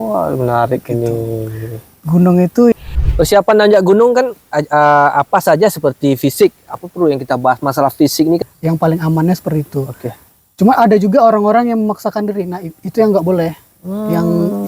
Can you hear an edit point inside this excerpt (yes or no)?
yes